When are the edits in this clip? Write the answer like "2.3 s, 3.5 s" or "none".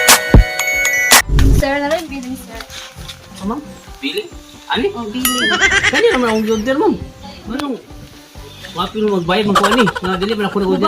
1.3 s